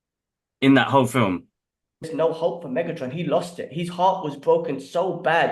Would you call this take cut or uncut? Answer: cut